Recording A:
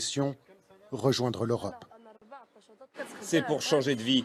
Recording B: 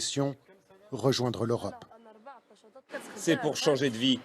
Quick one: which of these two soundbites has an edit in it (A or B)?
B